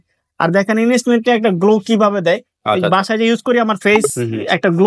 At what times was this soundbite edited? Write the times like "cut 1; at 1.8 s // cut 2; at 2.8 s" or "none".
none